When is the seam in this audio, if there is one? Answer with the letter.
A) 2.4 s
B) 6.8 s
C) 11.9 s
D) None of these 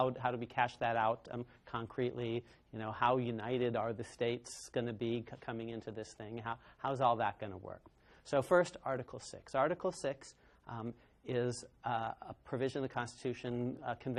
D